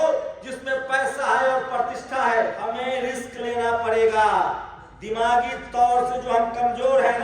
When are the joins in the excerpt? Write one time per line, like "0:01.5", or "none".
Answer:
0:02.7